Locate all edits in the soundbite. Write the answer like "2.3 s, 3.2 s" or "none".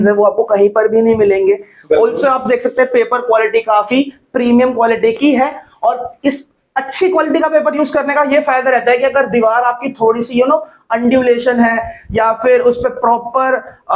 none